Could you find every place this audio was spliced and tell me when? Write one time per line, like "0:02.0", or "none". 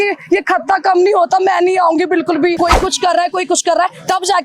0:02.6